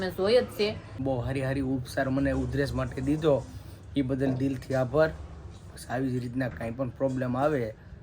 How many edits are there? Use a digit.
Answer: 1